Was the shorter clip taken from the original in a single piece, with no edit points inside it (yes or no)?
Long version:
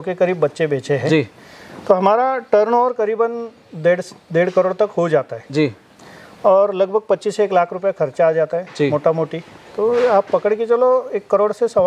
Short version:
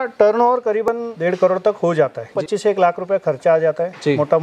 no